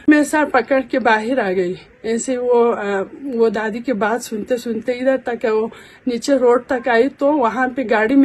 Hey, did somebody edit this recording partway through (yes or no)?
no